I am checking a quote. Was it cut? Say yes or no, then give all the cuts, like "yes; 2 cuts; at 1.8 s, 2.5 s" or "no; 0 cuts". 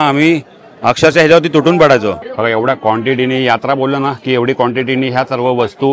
yes; 1 cut; at 2.2 s